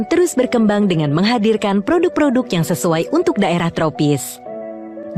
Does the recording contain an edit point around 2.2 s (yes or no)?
no